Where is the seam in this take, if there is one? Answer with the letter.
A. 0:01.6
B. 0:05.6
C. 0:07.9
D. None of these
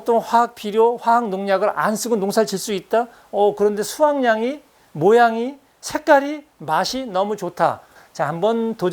C